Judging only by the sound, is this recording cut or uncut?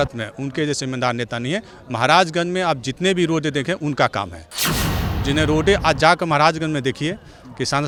uncut